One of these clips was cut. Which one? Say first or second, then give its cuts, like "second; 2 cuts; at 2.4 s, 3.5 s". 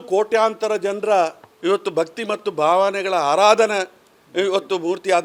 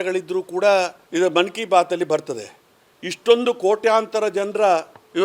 second; 1 cut; at 1.0 s